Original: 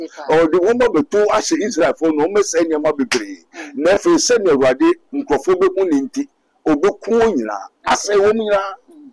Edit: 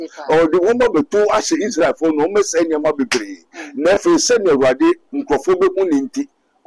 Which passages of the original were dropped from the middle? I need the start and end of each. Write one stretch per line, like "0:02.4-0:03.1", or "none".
none